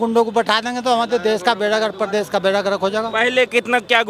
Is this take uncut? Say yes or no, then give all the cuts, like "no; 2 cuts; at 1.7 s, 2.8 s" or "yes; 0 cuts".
yes; 0 cuts